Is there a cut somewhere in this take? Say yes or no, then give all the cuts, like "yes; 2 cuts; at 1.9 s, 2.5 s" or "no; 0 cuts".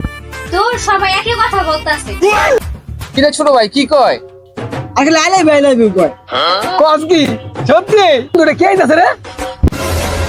yes; 2 cuts; at 2.6 s, 8.3 s